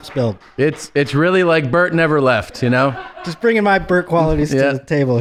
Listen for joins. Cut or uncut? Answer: uncut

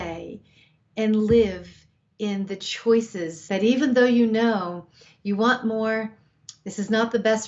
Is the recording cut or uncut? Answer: cut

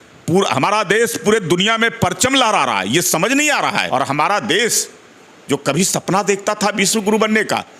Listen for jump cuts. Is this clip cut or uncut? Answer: cut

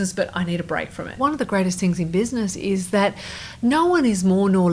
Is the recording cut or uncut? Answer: cut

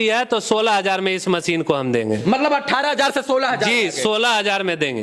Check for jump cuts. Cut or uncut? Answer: uncut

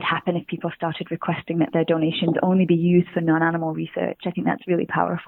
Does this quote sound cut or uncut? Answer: uncut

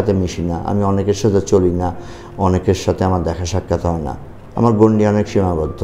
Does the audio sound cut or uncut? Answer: uncut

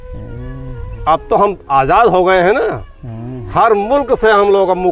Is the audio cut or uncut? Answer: uncut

